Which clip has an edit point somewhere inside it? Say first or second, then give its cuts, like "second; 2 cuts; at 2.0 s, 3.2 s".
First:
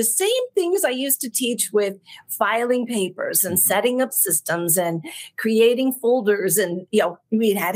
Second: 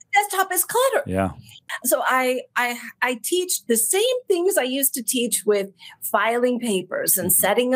second; 1 cut; at 1.6 s